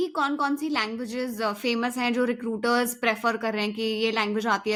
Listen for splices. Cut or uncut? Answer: uncut